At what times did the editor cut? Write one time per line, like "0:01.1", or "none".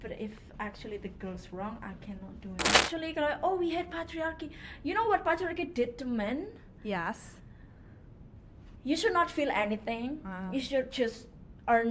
0:02.9